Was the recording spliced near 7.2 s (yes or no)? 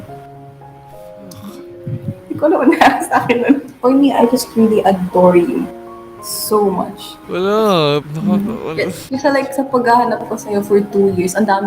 yes